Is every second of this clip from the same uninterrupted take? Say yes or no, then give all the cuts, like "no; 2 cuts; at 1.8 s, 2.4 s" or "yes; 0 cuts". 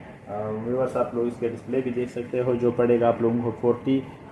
yes; 0 cuts